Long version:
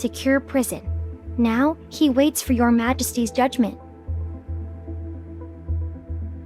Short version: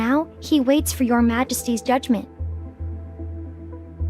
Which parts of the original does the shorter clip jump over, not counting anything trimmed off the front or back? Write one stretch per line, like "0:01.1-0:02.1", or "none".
0:03.8-0:04.0